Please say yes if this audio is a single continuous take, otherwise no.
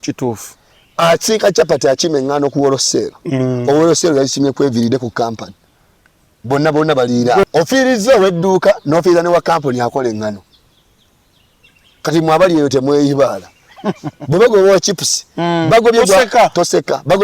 no